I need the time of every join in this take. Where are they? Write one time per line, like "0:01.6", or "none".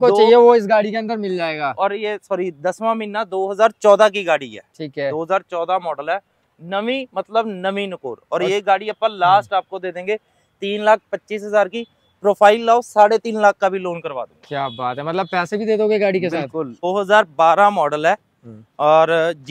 0:16.8

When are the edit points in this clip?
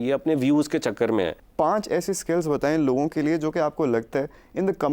0:01.4

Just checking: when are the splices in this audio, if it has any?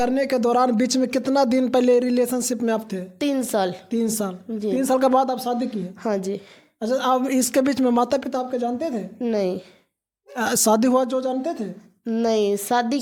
none

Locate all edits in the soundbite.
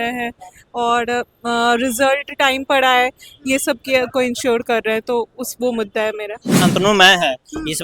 0:06.6

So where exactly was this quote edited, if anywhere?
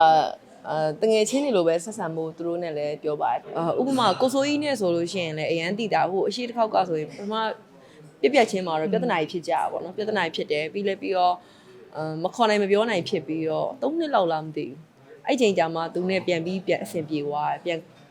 0:03.4

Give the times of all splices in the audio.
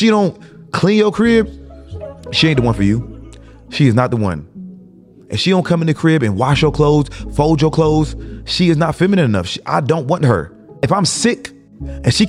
0:10.8

